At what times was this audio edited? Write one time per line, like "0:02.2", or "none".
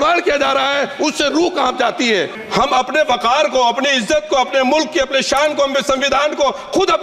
0:02.3